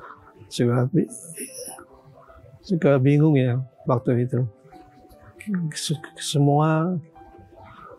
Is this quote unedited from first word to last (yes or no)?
yes